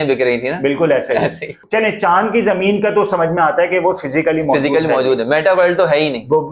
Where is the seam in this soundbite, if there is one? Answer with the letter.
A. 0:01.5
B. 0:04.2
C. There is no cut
A